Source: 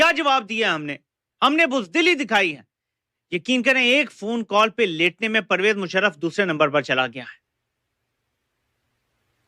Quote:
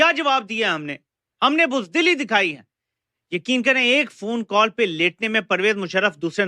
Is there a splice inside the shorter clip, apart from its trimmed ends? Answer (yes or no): no